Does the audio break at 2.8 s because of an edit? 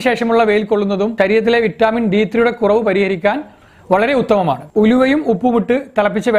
no; 1 cut; at 4.6 s

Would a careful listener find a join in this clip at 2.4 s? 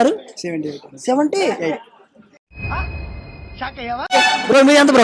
no; 1 cut; at 4.1 s

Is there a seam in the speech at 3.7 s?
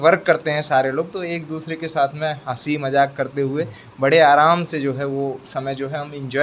no; 0 cuts

